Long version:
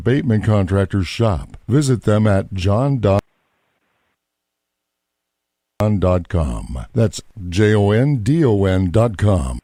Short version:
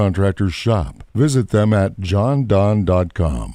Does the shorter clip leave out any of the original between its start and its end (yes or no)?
yes